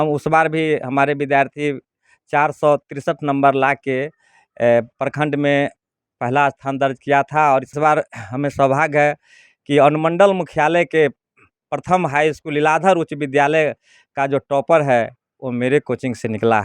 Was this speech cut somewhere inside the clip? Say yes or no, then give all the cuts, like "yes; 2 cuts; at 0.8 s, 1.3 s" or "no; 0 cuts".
yes; 1 cut; at 7.7 s